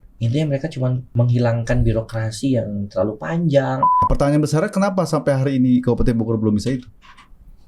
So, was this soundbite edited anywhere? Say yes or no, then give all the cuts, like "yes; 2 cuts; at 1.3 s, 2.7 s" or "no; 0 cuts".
yes; 2 cuts; at 1.0 s, 4.1 s